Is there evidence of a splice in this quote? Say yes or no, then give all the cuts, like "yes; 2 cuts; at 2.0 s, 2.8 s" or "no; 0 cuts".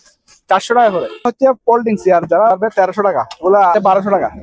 yes; 3 cuts; at 1.3 s, 2.5 s, 3.7 s